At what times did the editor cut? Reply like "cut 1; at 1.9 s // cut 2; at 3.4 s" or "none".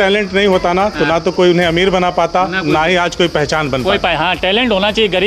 none